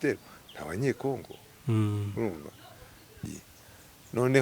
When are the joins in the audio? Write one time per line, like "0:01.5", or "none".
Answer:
0:03.2